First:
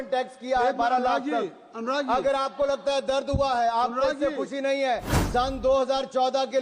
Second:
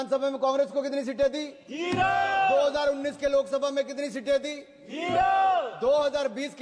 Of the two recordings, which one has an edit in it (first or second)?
first